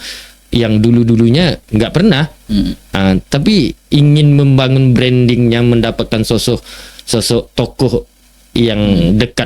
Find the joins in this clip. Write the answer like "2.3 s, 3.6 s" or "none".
none